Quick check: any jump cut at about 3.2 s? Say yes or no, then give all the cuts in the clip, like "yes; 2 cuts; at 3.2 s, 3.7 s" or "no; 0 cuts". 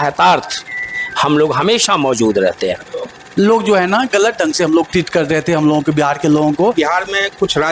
yes; 2 cuts; at 3.2 s, 6.7 s